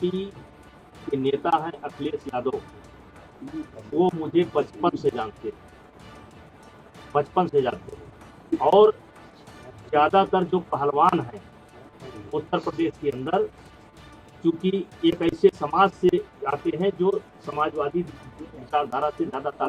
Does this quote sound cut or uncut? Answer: uncut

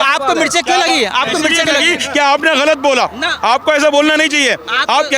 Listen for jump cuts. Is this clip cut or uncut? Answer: uncut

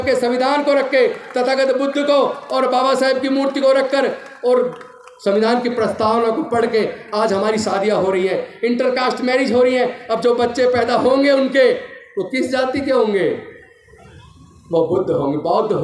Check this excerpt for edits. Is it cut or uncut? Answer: uncut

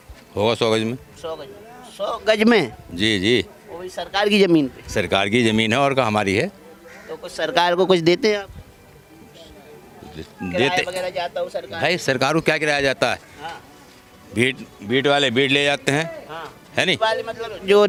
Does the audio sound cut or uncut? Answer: uncut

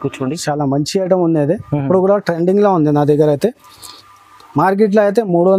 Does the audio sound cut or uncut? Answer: uncut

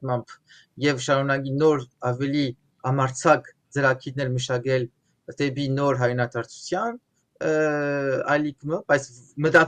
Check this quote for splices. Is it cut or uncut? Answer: uncut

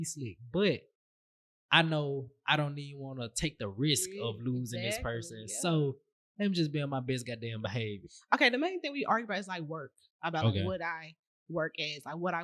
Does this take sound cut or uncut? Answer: cut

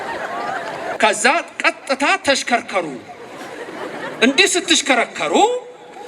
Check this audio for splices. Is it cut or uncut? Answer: cut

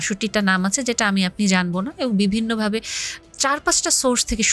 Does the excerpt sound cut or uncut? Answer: uncut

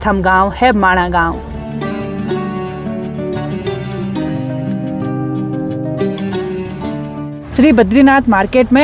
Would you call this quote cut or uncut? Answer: uncut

